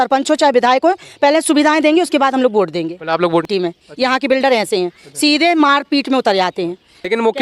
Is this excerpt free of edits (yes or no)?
no